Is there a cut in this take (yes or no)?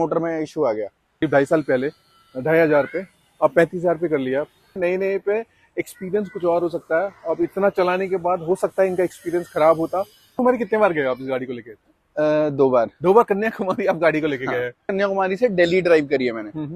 yes